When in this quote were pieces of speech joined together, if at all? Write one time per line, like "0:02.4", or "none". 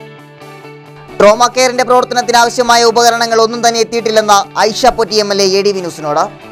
none